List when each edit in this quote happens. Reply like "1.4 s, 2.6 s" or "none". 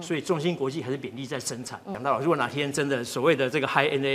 1.9 s